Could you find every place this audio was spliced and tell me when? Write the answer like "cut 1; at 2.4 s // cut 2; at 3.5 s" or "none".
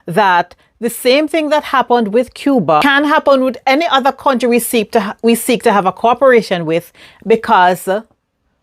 cut 1; at 2.8 s

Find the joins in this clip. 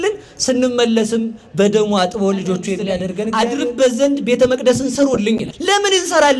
cut 1; at 3.2 s // cut 2; at 5.5 s

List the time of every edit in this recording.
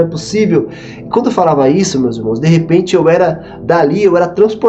none

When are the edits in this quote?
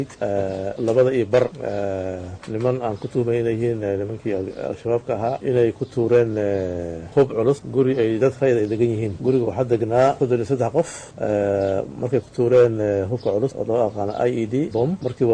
none

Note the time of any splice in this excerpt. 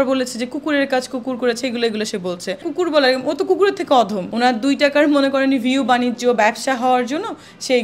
cut 1; at 2.6 s // cut 2; at 4.2 s

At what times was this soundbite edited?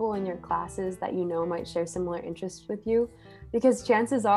none

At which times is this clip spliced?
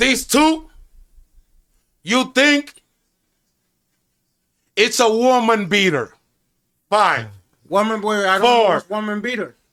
none

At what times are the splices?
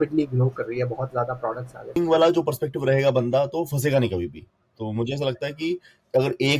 cut 1; at 1.9 s

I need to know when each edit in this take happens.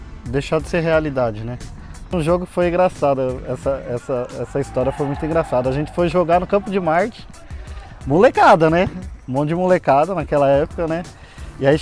cut 1; at 2.1 s

